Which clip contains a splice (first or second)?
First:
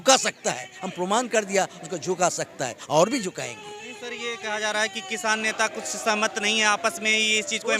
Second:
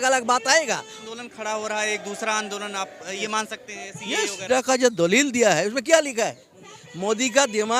second